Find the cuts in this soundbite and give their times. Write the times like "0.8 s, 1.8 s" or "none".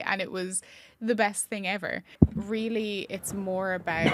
2.1 s